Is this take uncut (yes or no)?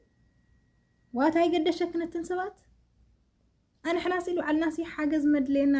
yes